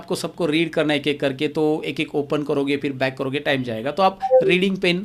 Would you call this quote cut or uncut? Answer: uncut